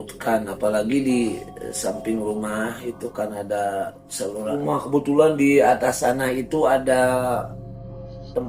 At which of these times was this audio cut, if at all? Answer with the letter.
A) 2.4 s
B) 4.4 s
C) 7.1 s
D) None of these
B